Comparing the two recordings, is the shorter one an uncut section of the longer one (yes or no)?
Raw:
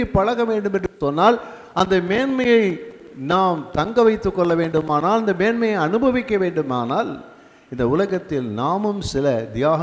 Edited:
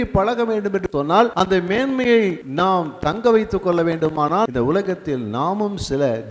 no